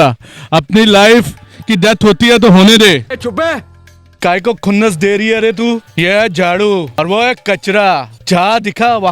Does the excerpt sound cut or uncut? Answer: cut